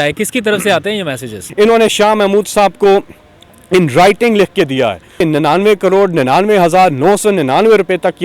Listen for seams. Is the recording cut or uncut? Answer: cut